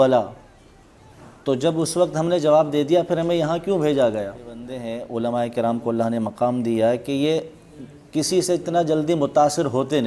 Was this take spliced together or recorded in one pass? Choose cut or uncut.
cut